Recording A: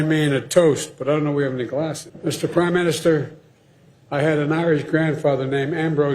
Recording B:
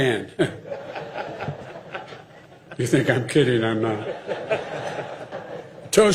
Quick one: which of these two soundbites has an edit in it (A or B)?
A